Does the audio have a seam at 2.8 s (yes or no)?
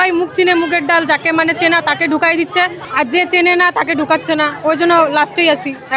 yes